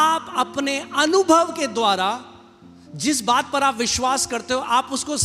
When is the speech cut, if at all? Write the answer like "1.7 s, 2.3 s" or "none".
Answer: none